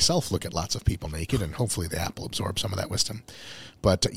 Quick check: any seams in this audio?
no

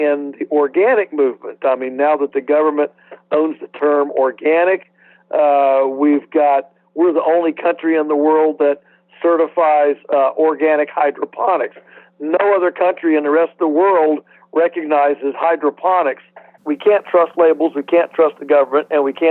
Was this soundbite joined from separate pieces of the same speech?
yes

